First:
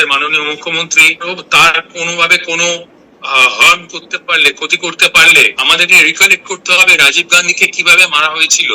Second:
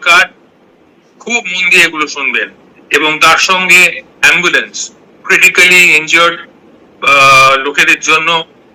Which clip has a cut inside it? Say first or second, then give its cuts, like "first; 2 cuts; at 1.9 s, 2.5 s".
first; 2 cuts; at 1.3 s, 5.6 s